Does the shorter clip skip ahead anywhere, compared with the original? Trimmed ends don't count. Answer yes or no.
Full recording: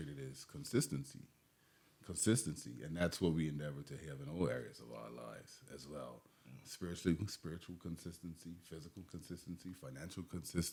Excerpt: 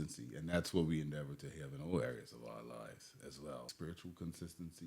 yes